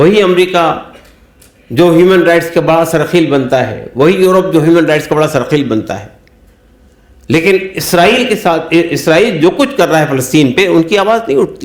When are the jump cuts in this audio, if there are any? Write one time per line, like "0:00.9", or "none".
none